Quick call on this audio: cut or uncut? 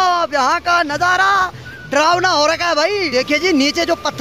cut